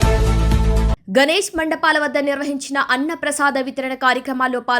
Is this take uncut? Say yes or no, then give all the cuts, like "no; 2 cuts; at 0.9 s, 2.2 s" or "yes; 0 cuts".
no; 1 cut; at 0.9 s